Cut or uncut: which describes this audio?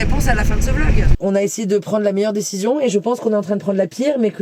cut